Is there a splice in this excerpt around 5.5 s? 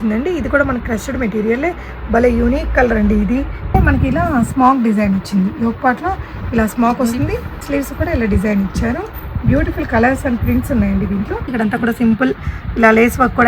no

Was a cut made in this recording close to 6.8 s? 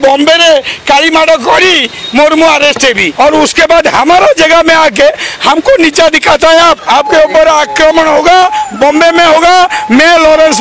yes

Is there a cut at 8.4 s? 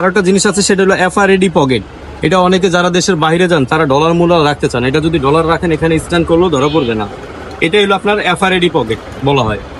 no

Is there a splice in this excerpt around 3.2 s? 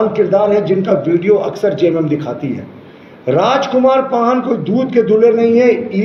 no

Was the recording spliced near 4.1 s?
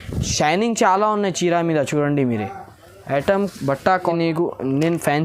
yes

